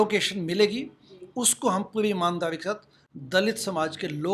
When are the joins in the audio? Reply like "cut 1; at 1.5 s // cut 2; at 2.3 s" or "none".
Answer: none